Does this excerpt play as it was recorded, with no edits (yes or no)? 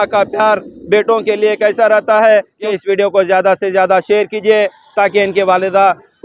no